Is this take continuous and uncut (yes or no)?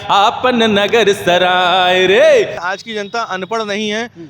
no